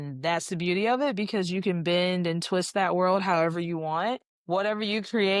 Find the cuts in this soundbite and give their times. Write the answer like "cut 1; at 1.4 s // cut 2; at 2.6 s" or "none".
cut 1; at 4.3 s